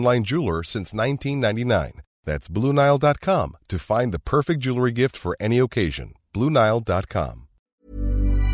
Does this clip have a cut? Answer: yes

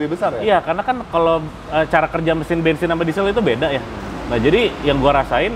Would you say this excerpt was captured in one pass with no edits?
yes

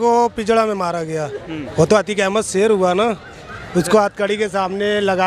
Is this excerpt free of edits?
no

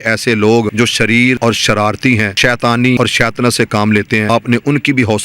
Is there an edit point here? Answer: yes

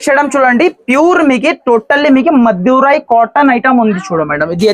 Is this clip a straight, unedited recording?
yes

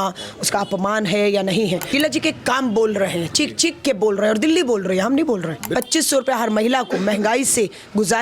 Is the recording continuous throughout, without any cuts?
no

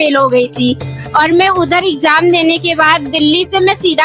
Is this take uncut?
yes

